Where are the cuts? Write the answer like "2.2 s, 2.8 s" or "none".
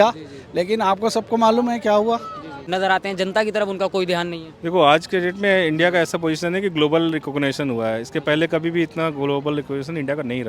2.5 s